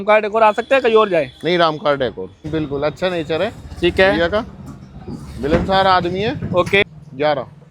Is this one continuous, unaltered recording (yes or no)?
no